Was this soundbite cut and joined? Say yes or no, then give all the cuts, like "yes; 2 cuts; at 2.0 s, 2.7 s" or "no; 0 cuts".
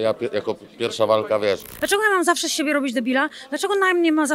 yes; 1 cut; at 1.7 s